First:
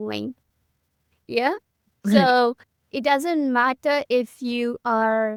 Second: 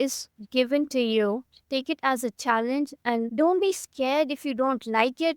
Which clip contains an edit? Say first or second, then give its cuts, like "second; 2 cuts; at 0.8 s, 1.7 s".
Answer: second; 1 cut; at 3.3 s